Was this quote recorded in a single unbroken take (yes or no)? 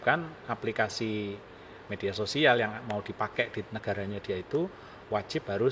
yes